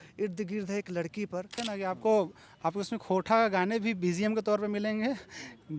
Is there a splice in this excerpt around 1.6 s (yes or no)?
yes